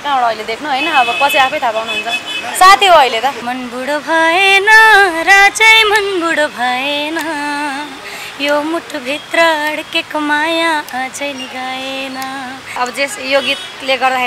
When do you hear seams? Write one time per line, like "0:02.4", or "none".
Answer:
0:03.5
0:12.7